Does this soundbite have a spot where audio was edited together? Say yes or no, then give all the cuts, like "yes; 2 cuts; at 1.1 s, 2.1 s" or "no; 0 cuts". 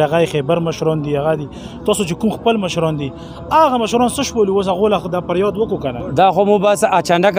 no; 0 cuts